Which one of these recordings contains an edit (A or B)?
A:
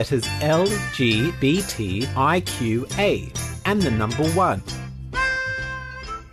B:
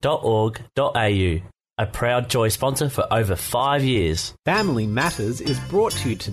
B